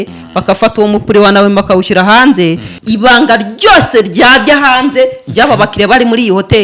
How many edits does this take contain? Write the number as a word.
one